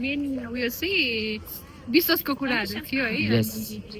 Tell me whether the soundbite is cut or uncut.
uncut